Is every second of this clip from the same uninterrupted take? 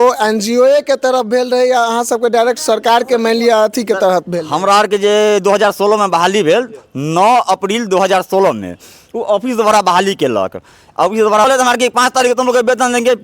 no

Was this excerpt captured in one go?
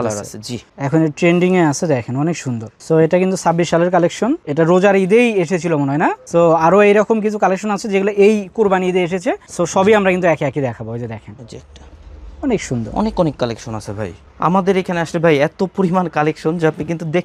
yes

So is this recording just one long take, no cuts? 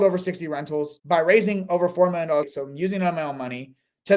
no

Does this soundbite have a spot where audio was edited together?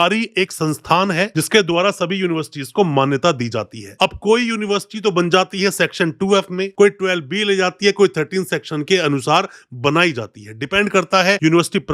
no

